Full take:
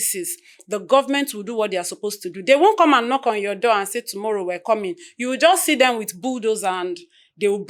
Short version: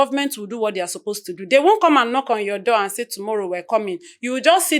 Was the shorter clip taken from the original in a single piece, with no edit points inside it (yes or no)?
yes